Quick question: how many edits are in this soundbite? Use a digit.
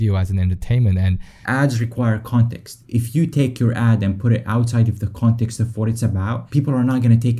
3